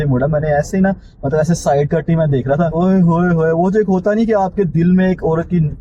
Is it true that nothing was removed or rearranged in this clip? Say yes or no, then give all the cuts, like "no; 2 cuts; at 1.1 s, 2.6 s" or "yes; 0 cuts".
yes; 0 cuts